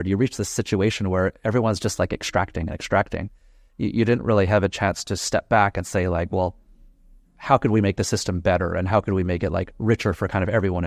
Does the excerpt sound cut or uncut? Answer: uncut